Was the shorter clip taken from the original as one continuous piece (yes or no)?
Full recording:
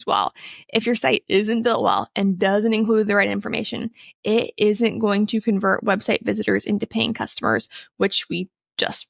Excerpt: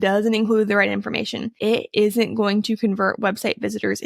no